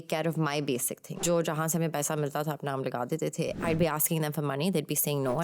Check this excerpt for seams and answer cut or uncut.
cut